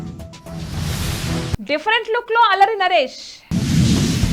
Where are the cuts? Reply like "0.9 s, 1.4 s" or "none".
none